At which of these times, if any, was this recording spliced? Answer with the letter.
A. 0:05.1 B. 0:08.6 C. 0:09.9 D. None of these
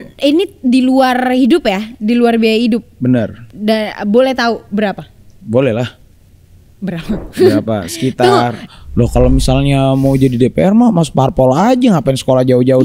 B